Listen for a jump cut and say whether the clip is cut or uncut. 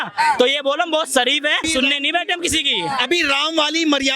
cut